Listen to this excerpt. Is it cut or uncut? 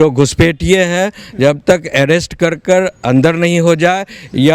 uncut